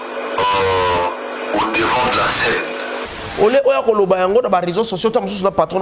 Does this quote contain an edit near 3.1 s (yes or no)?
yes